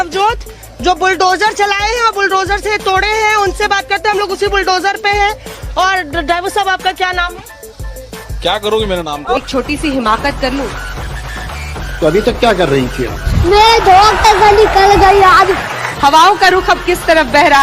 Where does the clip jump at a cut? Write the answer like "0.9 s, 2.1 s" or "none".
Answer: 9.2 s